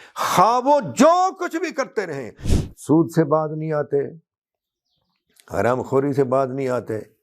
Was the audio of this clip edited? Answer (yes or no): yes